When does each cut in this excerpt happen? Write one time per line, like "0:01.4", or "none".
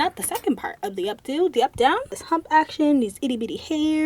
0:02.1